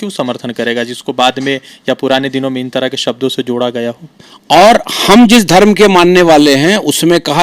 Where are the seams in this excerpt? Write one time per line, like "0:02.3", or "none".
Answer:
0:04.1